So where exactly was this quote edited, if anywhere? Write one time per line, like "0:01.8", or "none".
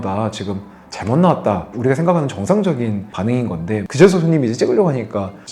0:01.7
0:03.8